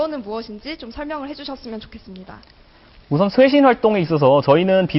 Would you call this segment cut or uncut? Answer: cut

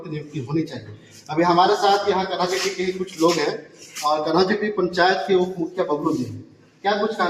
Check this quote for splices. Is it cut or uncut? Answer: uncut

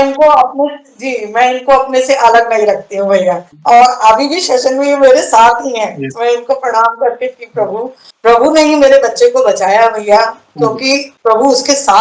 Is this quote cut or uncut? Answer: cut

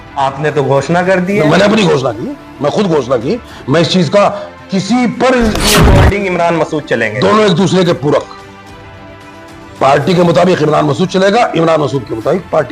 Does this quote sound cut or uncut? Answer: cut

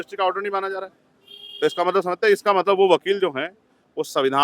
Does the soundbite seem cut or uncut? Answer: uncut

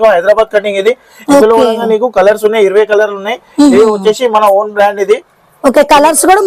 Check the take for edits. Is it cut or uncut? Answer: uncut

